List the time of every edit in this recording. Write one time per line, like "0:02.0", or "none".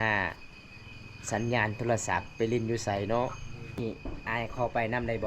0:03.8